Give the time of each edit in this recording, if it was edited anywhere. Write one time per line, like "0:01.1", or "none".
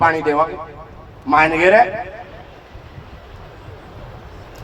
none